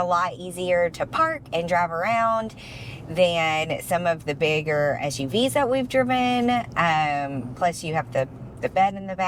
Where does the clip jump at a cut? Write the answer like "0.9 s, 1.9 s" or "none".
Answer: none

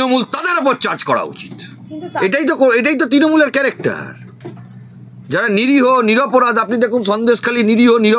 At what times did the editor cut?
2.1 s

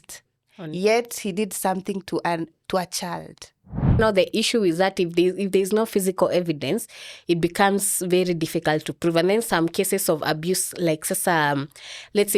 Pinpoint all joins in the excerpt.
4.0 s

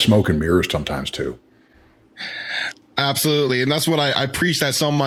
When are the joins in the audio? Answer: none

